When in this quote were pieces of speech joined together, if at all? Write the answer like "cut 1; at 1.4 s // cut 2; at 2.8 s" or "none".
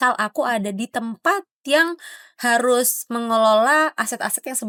none